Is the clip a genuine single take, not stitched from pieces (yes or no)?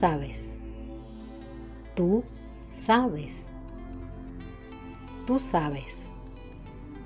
yes